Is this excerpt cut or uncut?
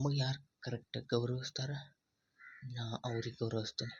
uncut